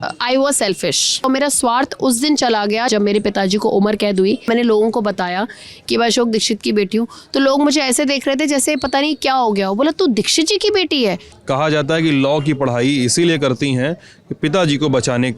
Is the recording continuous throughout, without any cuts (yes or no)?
no